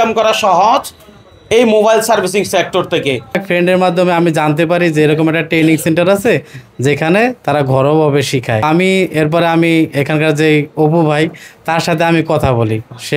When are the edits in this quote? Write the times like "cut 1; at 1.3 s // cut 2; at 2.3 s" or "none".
cut 1; at 3.4 s // cut 2; at 8.6 s